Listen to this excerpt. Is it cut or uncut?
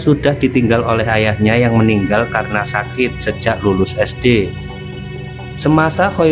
uncut